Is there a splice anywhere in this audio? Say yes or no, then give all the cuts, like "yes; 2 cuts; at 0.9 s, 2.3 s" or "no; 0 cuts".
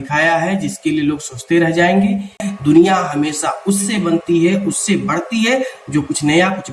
yes; 1 cut; at 2.4 s